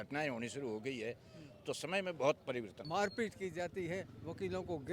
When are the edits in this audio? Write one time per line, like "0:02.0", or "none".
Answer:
0:02.8